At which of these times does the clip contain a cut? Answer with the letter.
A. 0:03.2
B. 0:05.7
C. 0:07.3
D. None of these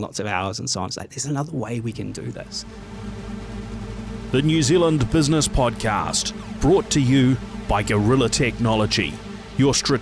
A